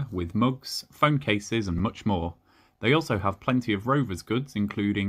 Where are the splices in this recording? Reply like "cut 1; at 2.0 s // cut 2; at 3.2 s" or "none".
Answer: none